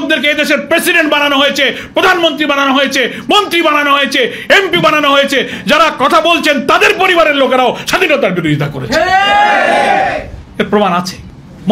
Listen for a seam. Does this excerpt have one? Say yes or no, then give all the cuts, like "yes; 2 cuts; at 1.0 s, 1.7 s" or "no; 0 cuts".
no; 0 cuts